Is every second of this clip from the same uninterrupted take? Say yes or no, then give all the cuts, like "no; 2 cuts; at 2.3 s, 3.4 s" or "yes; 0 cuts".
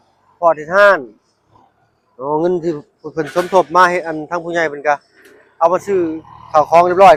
yes; 0 cuts